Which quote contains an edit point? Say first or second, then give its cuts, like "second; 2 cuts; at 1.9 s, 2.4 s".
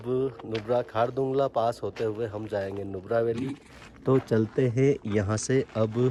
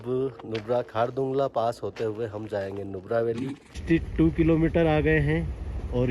second; 1 cut; at 3.8 s